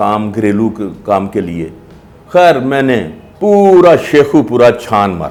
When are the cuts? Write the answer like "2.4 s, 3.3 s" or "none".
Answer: none